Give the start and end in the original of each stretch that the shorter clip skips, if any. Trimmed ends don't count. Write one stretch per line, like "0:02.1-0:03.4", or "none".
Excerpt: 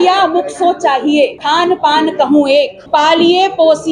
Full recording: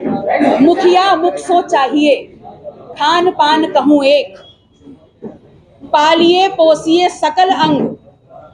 0:02.3-0:02.9
0:04.3-0:05.8